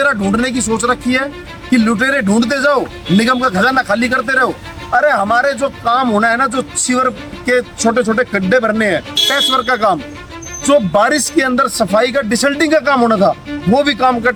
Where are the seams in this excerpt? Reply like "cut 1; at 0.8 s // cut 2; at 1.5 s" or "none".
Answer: none